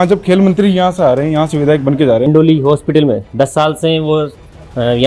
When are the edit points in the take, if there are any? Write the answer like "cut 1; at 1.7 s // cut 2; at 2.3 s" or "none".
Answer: cut 1; at 2.3 s